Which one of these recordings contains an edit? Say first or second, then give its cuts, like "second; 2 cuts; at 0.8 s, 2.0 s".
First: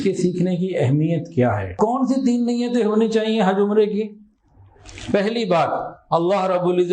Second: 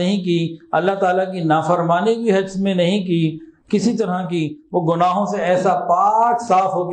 first; 1 cut; at 1.7 s